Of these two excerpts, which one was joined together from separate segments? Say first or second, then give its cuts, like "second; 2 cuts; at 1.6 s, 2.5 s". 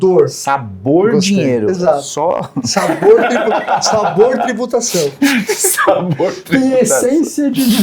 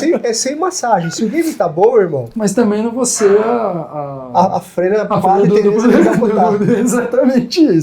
second; 1 cut; at 2.2 s